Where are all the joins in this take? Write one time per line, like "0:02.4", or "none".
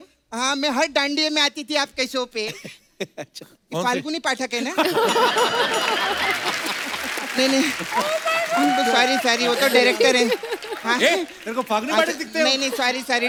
none